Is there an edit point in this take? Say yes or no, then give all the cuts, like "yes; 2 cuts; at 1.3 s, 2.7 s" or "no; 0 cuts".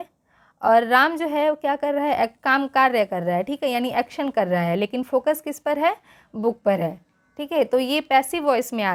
no; 0 cuts